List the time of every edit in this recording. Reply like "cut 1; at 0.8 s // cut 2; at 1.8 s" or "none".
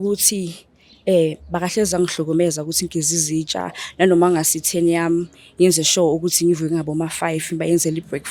none